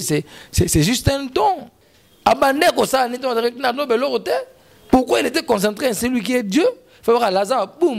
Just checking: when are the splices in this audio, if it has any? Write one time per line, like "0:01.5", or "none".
0:01.8